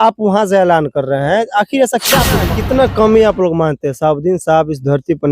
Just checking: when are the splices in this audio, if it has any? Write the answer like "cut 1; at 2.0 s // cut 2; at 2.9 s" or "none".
cut 1; at 2.5 s

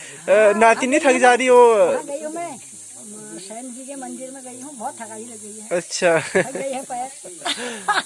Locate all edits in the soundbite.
none

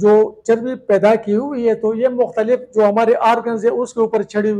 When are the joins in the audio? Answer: none

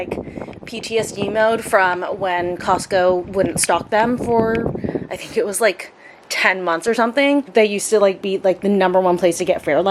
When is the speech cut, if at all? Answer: none

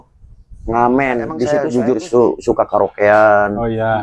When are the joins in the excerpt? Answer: cut 1; at 1.5 s

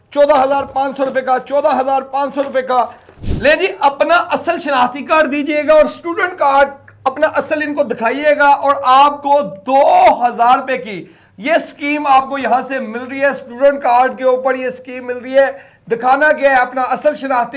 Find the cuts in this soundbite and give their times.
cut 1; at 3.2 s

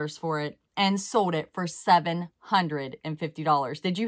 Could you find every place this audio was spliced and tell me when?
none

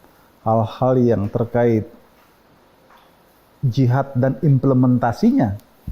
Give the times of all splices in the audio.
none

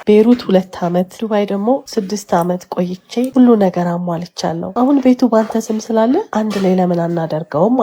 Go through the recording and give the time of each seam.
cut 1; at 1.2 s // cut 2; at 1.9 s // cut 3; at 3.3 s // cut 4; at 4.6 s // cut 5; at 6.3 s

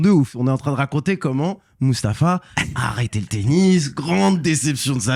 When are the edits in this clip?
none

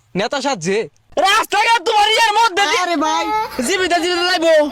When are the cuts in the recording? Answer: cut 1; at 1.0 s

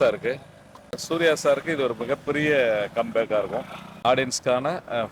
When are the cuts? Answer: cut 1; at 1.0 s // cut 2; at 3.9 s

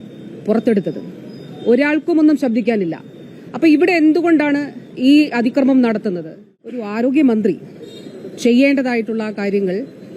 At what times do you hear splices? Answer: cut 1; at 6.8 s

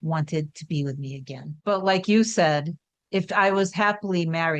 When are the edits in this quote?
cut 1; at 1.5 s

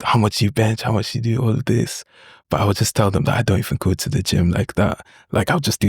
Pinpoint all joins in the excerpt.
none

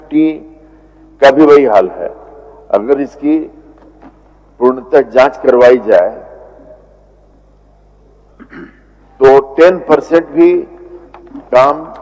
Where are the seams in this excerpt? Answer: none

